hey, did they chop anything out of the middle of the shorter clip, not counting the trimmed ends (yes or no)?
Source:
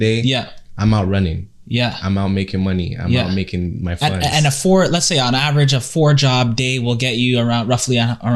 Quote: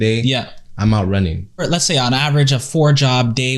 yes